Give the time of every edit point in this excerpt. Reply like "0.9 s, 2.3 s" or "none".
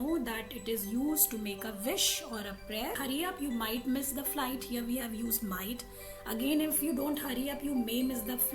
3.0 s